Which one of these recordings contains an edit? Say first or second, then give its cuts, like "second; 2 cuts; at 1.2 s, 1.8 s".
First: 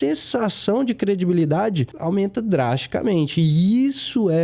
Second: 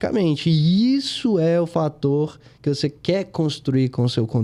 first; 1 cut; at 1.9 s